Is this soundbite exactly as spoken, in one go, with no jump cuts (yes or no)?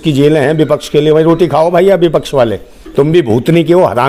yes